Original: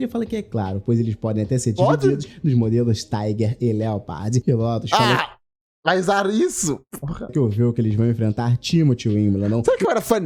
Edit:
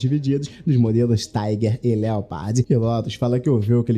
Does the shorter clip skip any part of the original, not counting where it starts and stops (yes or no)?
yes